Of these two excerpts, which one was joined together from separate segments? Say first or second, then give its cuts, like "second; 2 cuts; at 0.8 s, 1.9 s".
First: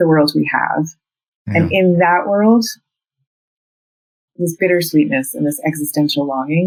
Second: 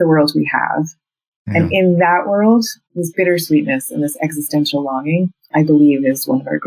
second; 2 cuts; at 2.8 s, 5.4 s